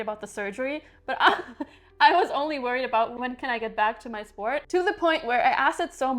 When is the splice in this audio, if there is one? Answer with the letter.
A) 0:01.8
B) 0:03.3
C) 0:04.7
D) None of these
C